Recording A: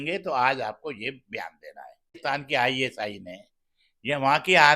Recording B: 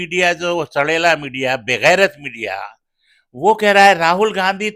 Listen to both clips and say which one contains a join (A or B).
A